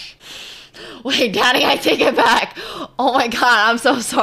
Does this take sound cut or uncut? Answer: uncut